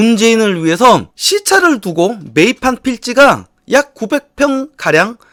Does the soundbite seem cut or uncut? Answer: uncut